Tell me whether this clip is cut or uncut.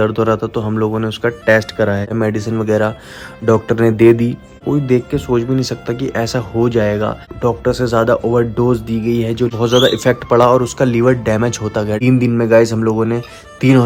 cut